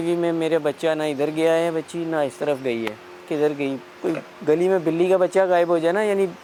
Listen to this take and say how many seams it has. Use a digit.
0